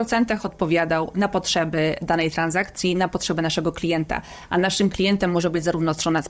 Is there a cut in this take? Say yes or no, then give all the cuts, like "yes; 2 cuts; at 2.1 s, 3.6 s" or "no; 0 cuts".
no; 0 cuts